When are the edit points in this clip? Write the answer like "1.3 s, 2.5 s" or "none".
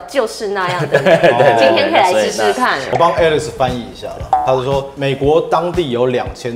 2.8 s